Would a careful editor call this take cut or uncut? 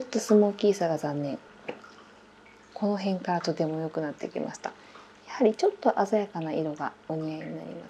cut